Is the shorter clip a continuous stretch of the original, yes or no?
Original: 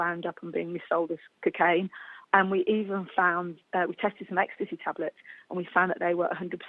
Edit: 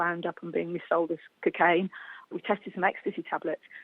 no